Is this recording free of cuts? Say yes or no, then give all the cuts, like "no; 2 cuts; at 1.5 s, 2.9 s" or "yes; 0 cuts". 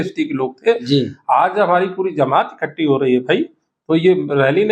yes; 0 cuts